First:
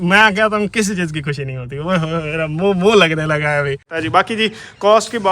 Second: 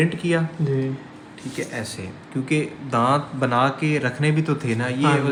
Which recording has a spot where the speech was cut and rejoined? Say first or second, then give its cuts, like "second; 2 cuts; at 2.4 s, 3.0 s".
first; 1 cut; at 3.9 s